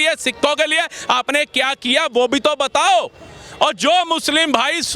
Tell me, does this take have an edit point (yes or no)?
no